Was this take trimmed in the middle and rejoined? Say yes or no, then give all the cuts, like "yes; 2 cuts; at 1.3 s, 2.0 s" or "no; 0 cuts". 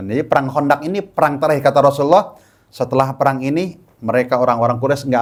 no; 0 cuts